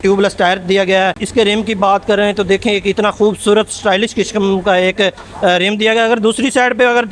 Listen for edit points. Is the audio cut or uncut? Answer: uncut